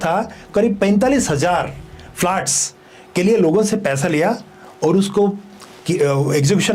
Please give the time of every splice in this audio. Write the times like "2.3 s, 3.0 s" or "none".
none